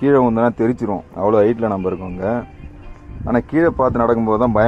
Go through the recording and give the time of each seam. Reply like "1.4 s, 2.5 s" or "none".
none

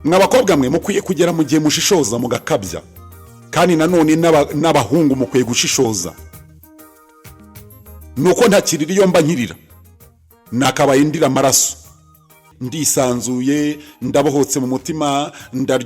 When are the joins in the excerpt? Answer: 12.5 s

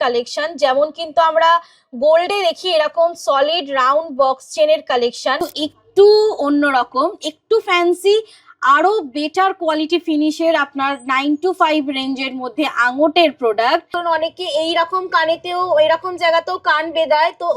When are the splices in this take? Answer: 5.5 s, 13.9 s

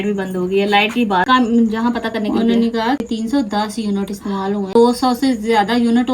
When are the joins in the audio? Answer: 1.3 s, 3.0 s, 4.8 s

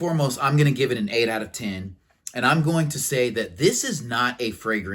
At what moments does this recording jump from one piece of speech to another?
none

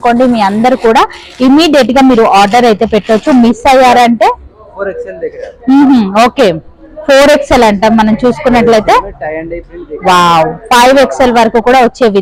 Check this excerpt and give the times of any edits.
none

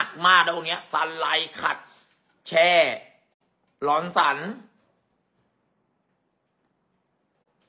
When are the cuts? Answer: none

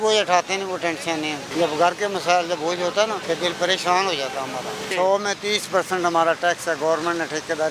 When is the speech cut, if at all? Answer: 1.5 s, 3.2 s, 4.9 s

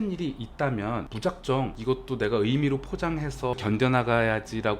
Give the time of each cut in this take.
1.1 s, 1.8 s, 3.6 s

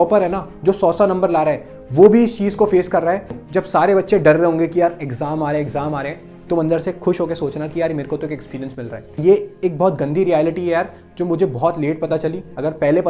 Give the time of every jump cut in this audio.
3.4 s, 9.2 s

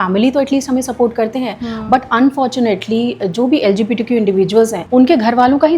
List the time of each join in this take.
4.8 s

